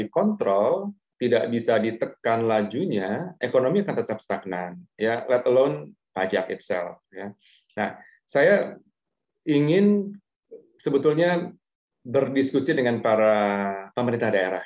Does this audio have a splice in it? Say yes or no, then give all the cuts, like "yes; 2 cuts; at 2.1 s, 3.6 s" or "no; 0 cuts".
no; 0 cuts